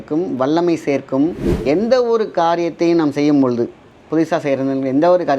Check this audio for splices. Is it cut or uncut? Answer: cut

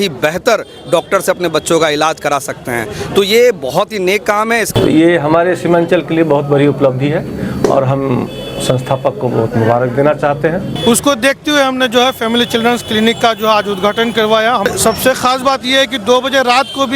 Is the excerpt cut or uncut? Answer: cut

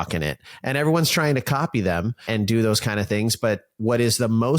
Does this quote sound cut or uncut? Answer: cut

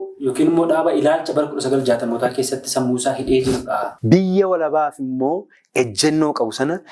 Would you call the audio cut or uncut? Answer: cut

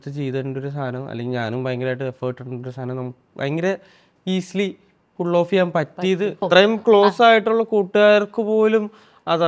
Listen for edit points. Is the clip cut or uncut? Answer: cut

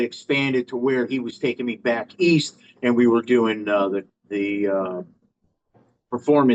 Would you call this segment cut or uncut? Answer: uncut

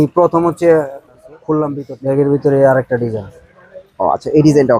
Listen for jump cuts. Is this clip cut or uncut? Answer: cut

